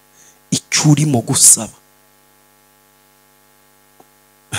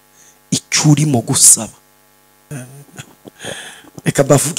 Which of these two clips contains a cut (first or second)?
second